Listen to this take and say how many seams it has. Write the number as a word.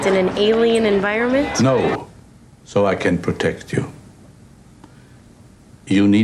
one